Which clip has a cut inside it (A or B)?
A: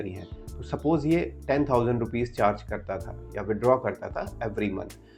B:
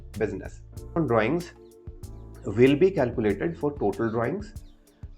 B